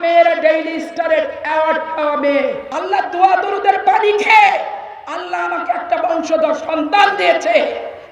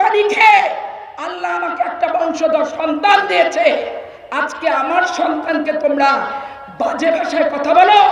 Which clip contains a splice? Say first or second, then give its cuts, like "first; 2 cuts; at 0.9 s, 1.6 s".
first; 1 cut; at 2.7 s